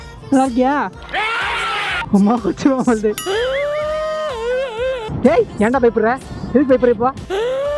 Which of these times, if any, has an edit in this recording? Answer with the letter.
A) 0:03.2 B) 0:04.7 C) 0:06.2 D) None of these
A